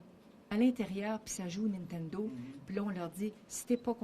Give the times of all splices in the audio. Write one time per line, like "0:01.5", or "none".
0:03.0